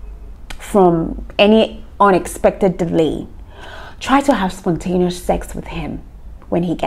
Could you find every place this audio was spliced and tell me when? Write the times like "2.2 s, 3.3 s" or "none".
none